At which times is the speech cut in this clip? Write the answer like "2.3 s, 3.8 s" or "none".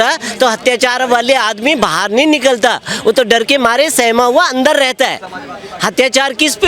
none

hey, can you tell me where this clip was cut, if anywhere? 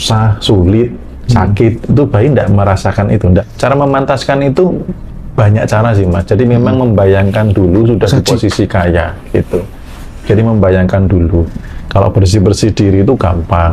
3.5 s, 11.5 s

